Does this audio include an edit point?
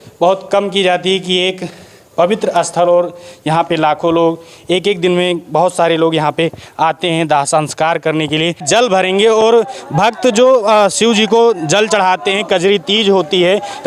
yes; 1 cut; at 8.6 s

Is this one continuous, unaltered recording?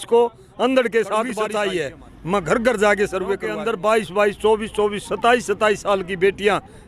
no; 2 cuts; at 1.5 s, 3.5 s

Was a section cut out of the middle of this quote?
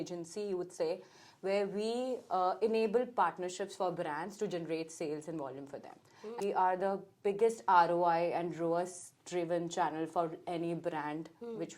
yes; 1 cut; at 6.4 s

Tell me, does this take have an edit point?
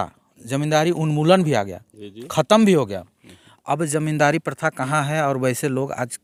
no; 0 cuts

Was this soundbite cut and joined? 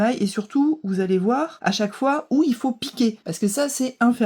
yes; 2 cuts; at 1.5 s, 3.3 s

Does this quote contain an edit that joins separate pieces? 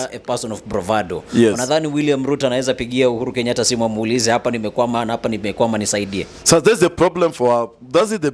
no; 0 cuts

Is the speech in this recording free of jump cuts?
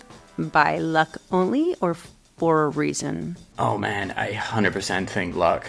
no; 1 cut; at 3.4 s

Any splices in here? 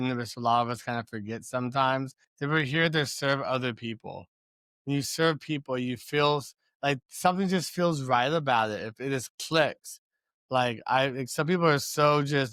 no; 0 cuts

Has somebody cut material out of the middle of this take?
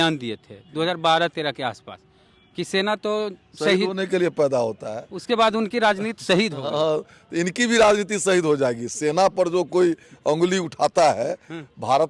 no; 0 cuts

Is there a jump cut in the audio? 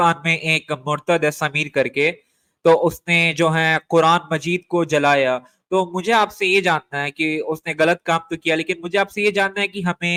no; 0 cuts

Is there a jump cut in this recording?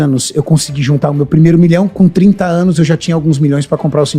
no; 0 cuts

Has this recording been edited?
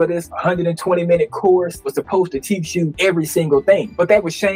no; 0 cuts

